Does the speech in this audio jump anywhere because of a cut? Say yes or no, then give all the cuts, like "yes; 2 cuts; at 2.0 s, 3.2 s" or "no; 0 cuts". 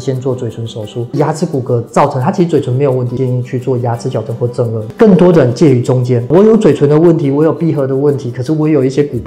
yes; 4 cuts; at 1.1 s, 3.1 s, 4.9 s, 6.2 s